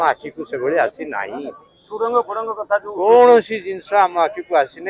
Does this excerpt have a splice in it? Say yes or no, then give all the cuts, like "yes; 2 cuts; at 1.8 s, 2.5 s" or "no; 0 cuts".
no; 0 cuts